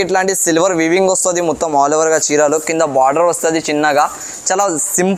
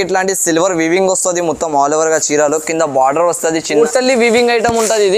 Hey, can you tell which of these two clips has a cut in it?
second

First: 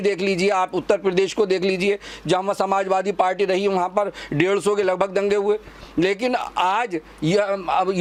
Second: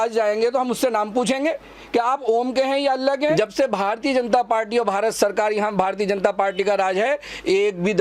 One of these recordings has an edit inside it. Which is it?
second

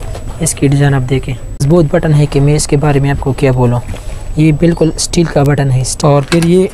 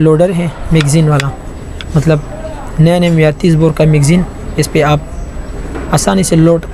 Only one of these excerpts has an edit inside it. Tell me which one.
first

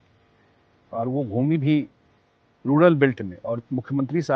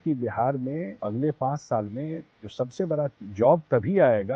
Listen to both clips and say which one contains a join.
second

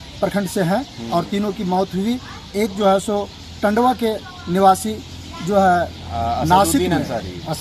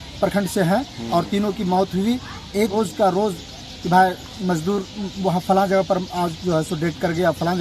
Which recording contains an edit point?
second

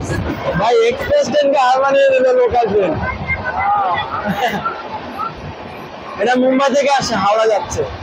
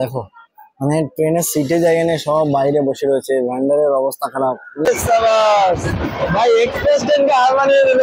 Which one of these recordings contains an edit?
second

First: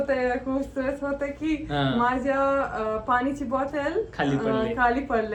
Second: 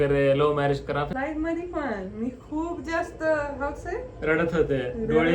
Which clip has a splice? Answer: second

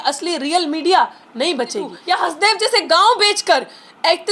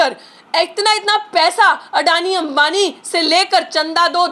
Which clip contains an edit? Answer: first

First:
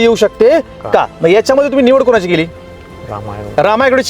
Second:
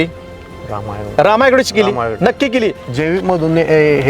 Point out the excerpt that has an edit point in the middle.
second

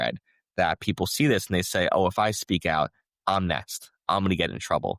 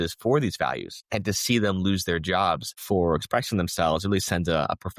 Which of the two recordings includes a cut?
second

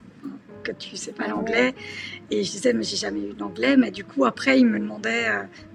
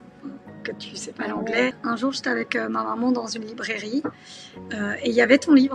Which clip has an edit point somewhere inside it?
second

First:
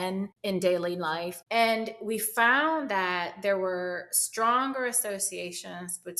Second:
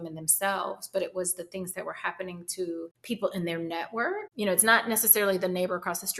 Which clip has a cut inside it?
second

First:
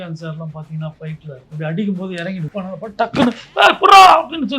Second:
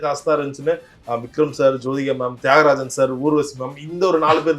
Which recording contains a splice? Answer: first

